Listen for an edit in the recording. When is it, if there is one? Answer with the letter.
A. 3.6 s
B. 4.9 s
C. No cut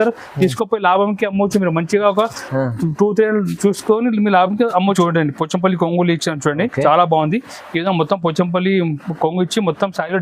B